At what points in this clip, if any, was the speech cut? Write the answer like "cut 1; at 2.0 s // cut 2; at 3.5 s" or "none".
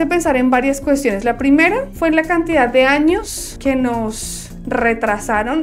none